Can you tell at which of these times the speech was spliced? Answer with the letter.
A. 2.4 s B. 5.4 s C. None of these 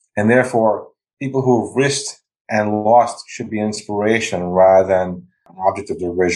B